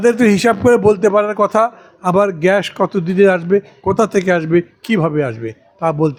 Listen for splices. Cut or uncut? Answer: uncut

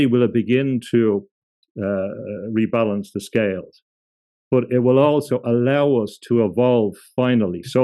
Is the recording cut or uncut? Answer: cut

